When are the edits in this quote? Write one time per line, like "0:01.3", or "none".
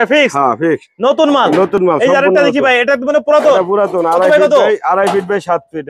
none

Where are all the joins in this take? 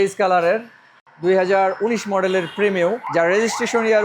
0:01.0
0:03.0

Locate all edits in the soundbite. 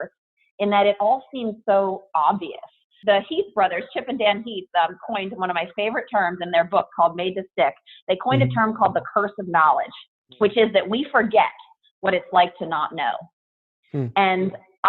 0:02.9

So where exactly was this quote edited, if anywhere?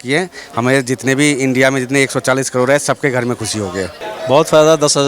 0:04.0

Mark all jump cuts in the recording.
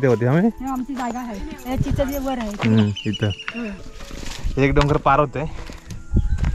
0:03.8

